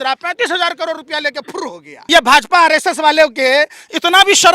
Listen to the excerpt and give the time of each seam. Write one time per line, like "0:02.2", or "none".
0:01.9